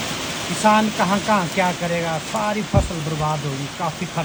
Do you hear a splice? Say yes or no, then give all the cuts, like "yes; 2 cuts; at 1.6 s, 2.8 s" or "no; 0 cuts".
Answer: no; 0 cuts